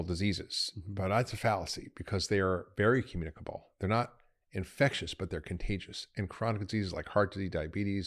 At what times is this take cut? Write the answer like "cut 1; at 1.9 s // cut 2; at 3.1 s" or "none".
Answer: none